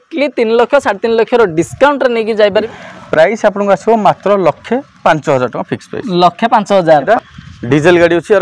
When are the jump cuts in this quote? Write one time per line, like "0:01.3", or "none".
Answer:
0:02.6
0:07.1